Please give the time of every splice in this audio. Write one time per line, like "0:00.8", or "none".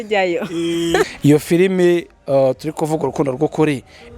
0:01.1